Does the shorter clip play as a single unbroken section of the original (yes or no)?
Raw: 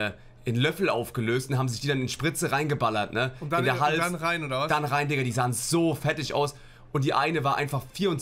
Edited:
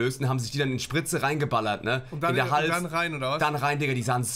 yes